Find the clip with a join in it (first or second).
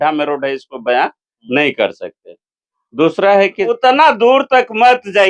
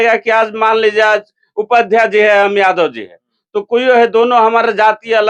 first